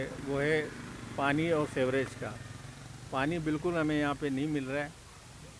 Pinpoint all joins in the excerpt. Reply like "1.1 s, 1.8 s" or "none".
none